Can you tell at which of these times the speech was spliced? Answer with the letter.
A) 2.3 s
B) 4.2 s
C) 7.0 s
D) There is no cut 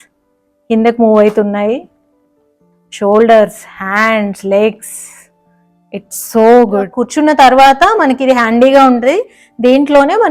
C